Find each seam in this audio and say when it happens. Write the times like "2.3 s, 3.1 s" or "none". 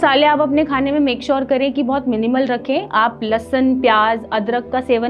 none

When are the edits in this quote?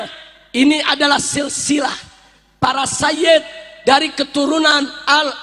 none

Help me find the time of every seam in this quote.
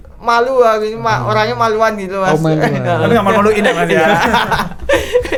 none

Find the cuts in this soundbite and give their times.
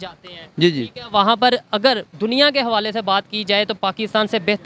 none

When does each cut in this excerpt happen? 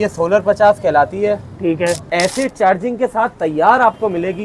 2.1 s

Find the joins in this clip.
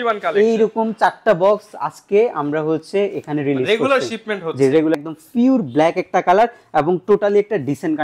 5.1 s

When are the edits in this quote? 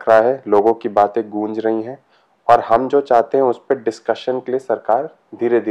none

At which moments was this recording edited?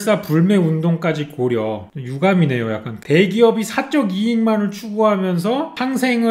1.9 s, 2.9 s

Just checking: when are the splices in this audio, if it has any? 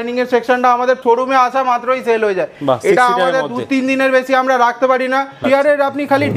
1.0 s, 5.3 s

